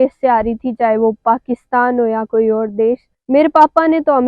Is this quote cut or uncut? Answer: cut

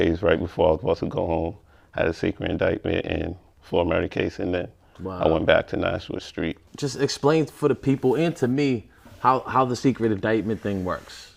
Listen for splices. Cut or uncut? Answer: uncut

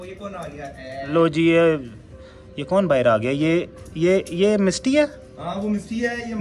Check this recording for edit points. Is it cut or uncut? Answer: uncut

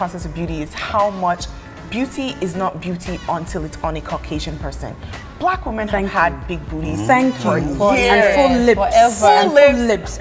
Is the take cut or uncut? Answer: uncut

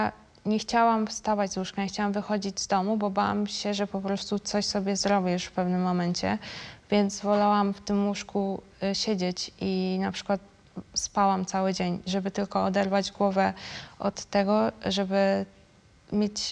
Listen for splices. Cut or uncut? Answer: uncut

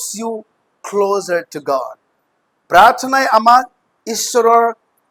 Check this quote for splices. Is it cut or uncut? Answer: uncut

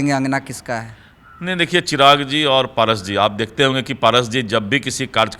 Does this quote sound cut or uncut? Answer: uncut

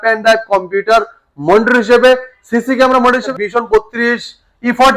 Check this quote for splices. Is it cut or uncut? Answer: cut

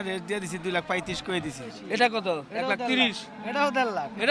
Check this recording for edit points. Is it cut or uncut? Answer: cut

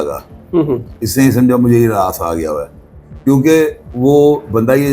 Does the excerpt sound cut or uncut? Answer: uncut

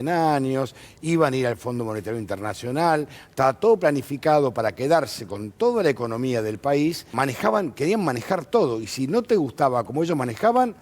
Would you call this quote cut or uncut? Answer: cut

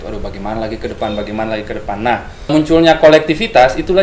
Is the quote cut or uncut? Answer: cut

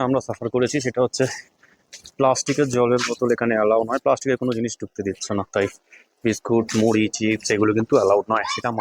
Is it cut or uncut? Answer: uncut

